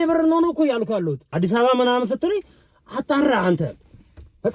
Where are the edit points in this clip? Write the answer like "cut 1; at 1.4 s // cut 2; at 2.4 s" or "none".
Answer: cut 1; at 1.3 s